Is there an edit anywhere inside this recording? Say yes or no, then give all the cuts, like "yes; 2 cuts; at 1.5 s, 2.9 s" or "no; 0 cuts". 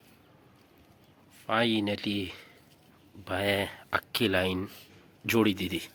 no; 0 cuts